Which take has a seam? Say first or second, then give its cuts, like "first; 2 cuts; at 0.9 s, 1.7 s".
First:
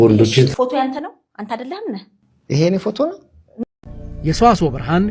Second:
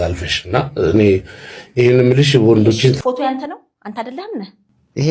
first; 1 cut; at 3.5 s